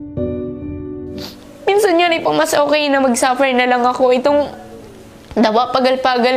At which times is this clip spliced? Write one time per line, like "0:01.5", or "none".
0:01.2